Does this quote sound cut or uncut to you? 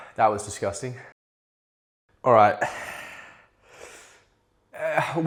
uncut